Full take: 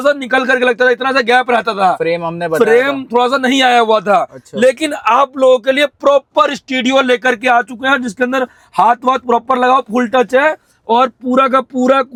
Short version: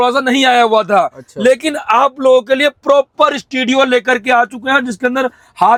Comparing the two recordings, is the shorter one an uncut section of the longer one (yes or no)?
yes